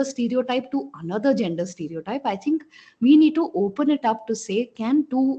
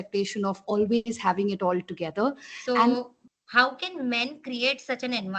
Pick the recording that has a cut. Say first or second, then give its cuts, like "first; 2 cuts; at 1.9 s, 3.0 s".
second; 1 cut; at 3.0 s